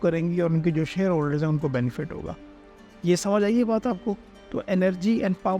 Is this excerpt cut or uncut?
uncut